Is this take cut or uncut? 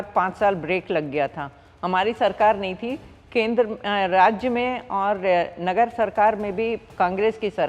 uncut